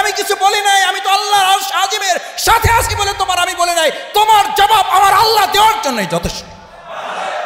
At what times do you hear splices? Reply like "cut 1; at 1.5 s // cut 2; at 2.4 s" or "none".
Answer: none

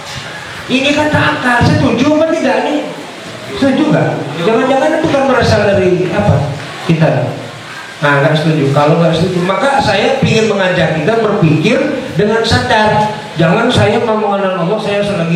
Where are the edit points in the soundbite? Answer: none

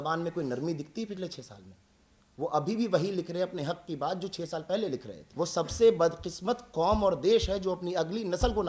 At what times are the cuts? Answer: cut 1; at 5.2 s

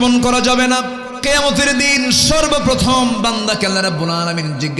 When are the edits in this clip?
cut 1; at 1.1 s

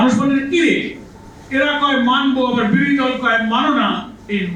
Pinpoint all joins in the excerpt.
none

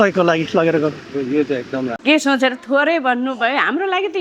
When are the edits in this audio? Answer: cut 1; at 2.0 s

